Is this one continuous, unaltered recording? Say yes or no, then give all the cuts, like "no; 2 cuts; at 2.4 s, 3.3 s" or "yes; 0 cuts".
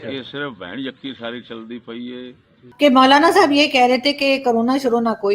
no; 1 cut; at 2.7 s